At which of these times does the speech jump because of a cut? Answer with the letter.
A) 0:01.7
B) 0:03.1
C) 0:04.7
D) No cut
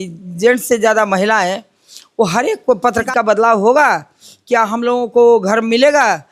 B